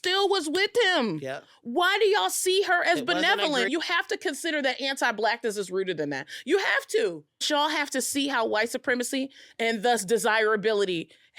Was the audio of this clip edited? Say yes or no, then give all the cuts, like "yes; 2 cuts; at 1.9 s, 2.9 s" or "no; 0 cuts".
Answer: yes; 1 cut; at 7.4 s